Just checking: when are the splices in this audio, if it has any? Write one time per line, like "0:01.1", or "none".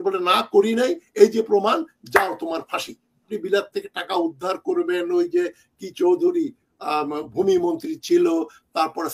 0:03.3